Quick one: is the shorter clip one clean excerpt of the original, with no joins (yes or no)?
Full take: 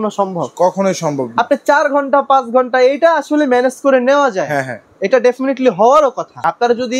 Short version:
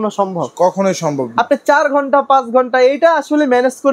yes